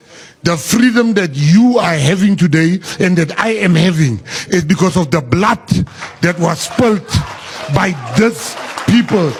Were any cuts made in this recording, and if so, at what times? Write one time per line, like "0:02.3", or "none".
none